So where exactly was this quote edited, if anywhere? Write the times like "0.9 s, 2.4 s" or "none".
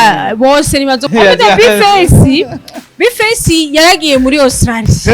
1.0 s